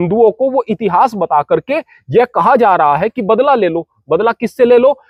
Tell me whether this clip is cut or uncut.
uncut